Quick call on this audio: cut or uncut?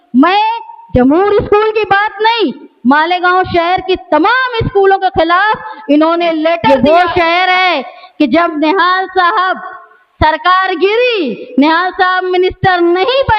cut